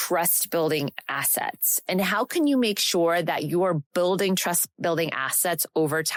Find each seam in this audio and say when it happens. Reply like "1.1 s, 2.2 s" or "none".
none

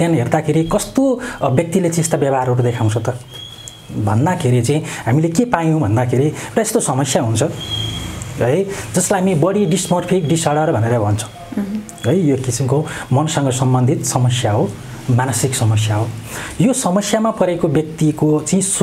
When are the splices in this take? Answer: none

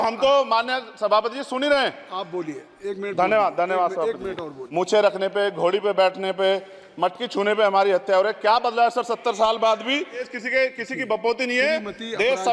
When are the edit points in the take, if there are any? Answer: 4.6 s, 10.3 s

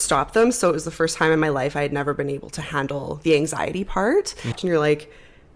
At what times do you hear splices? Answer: 4.5 s

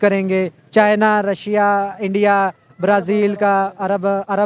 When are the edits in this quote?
none

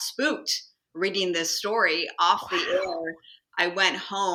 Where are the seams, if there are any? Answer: none

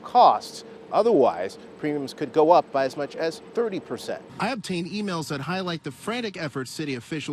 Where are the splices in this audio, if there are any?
4.3 s

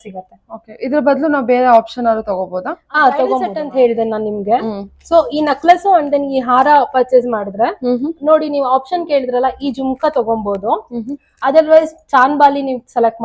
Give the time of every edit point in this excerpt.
3.6 s

